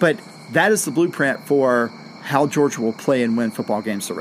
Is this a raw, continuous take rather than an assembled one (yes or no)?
yes